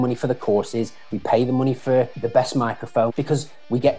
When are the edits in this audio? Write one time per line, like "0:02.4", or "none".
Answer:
0:02.2
0:03.1